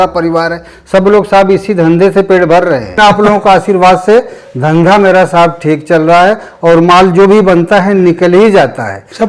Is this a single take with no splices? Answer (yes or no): no